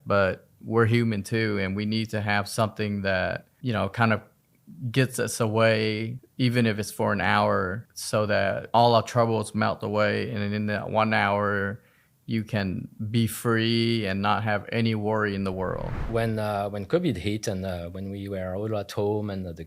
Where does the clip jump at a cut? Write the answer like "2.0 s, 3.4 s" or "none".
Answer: 3.5 s, 16.0 s

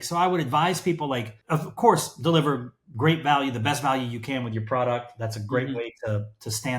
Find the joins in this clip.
1.3 s

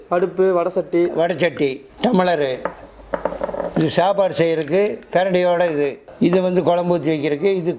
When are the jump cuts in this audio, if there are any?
1.9 s, 6.0 s

